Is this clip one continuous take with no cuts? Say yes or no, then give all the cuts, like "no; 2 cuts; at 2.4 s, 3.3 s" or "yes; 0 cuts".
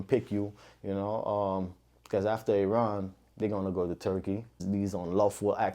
no; 1 cut; at 4.6 s